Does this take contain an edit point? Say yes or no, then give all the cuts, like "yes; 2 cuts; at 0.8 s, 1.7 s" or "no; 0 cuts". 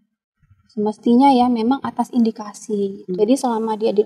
yes; 1 cut; at 3.0 s